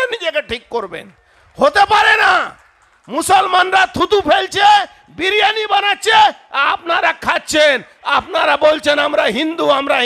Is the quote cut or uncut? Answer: uncut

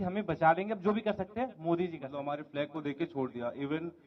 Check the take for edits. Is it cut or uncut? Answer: cut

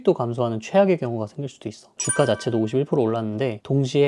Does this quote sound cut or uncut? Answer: cut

